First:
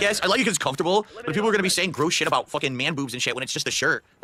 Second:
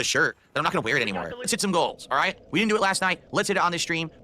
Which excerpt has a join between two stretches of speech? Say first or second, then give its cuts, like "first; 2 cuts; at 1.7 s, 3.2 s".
second; 1 cut; at 1.5 s